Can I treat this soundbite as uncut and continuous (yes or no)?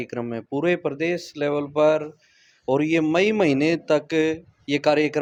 yes